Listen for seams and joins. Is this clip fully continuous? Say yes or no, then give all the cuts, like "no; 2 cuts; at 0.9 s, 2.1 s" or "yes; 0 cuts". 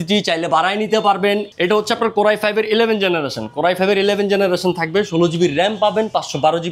no; 1 cut; at 1.5 s